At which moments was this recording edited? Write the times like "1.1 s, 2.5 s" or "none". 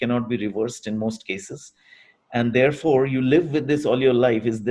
none